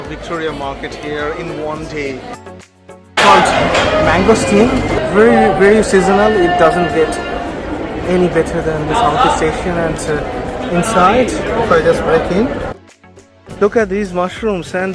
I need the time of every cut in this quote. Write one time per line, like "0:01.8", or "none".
0:02.4
0:13.4